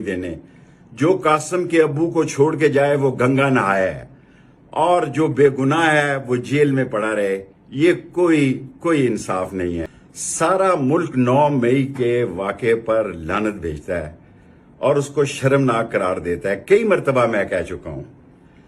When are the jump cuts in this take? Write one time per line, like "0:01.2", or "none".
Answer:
0:09.9

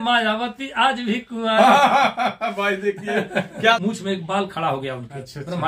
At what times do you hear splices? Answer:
0:03.8

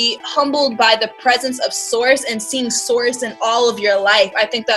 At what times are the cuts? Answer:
none

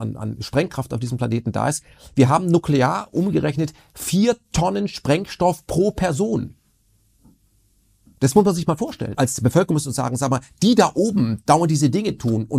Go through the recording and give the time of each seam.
0:09.1

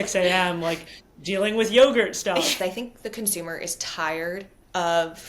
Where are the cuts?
0:02.6

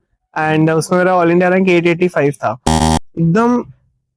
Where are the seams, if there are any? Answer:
0:02.7

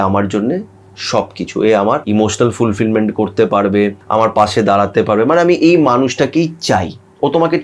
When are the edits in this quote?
0:02.0
0:04.0

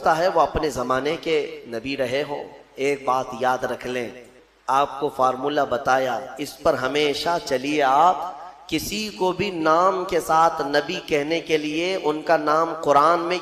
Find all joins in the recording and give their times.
0:04.3

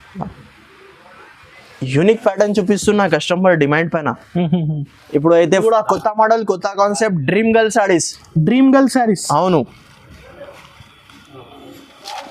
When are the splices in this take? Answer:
0:05.6

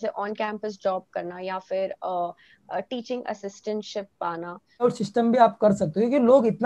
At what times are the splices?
0:04.8

